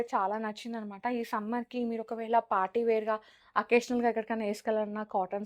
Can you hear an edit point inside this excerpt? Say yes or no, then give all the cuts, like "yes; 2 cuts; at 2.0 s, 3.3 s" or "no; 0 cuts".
no; 0 cuts